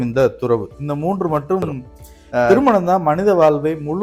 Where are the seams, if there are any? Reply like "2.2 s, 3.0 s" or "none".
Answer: 2.5 s